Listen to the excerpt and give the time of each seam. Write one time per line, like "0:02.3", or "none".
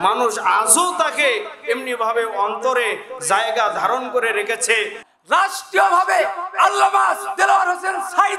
0:05.0